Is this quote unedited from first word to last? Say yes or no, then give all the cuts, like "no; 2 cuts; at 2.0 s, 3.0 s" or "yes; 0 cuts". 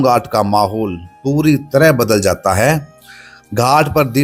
yes; 0 cuts